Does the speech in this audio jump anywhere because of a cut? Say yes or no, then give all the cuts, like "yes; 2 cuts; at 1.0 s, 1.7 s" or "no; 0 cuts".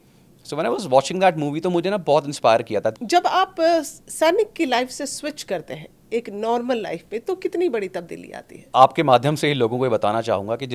yes; 2 cuts; at 3.0 s, 8.7 s